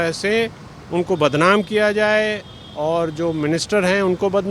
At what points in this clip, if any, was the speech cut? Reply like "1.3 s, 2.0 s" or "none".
none